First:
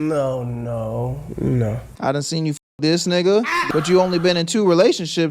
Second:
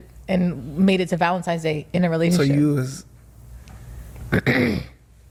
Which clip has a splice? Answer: first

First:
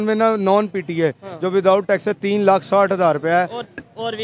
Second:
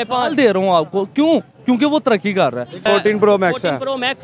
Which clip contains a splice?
second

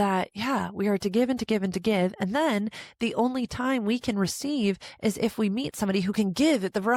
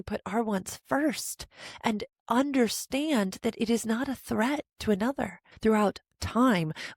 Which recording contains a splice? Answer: second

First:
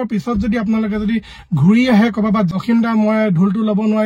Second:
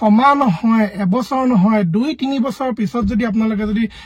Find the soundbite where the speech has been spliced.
first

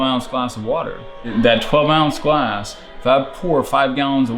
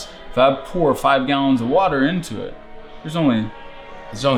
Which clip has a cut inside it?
first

